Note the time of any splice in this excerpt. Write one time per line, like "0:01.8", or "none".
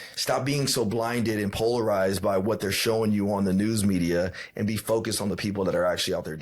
none